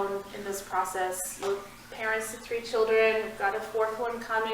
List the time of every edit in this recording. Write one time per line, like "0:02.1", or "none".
0:01.4